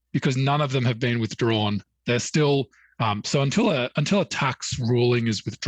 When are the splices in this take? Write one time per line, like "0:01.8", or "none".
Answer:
none